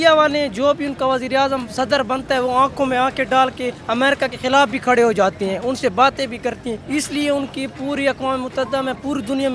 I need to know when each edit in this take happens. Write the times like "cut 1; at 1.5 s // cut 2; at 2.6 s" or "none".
cut 1; at 1.7 s // cut 2; at 4.1 s // cut 3; at 6.8 s